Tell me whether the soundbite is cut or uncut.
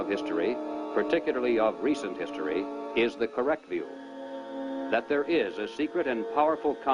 cut